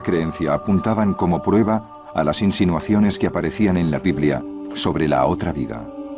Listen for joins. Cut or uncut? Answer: cut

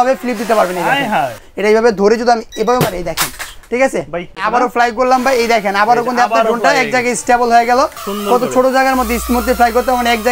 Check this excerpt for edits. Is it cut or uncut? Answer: cut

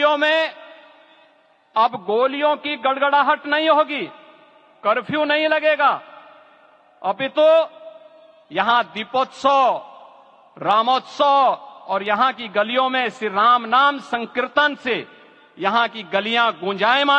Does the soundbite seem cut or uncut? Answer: uncut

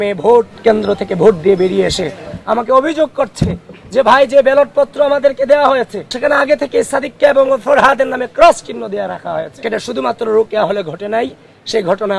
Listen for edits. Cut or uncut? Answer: cut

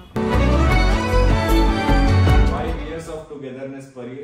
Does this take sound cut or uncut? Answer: cut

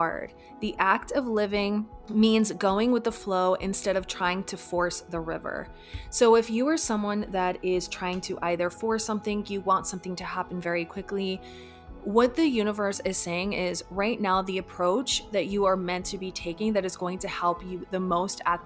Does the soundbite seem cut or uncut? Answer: uncut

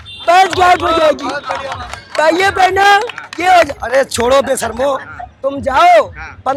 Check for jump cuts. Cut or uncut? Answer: uncut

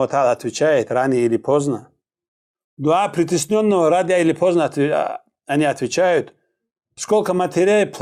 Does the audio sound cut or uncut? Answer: uncut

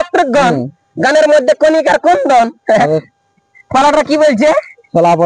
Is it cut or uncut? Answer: uncut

